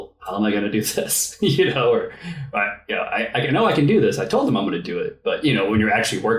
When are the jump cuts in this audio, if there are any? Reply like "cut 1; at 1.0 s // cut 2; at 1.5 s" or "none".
none